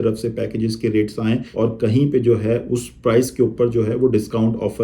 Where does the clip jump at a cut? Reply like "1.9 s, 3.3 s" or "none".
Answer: 1.5 s